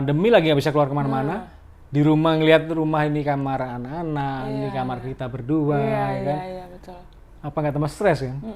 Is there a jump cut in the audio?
no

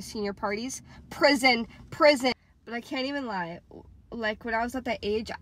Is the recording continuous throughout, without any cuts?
yes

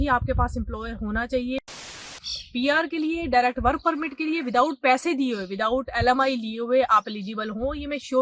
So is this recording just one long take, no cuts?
no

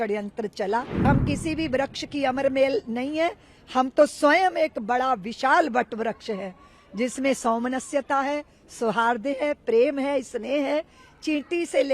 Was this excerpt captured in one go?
no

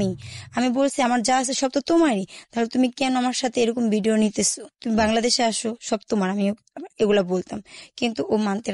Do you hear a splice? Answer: no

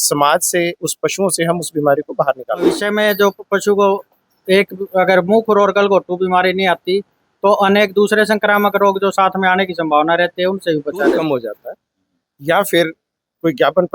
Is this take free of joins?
no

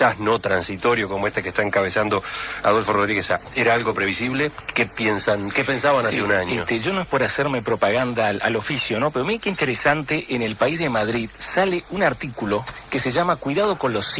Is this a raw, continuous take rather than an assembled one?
no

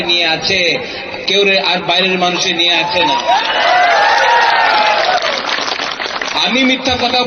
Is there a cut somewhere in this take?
yes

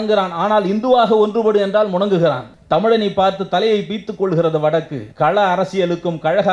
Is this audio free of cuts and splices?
no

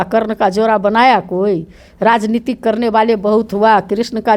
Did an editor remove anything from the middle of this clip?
no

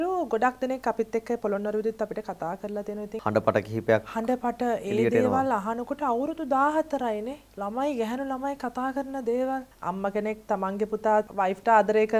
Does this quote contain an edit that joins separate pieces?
yes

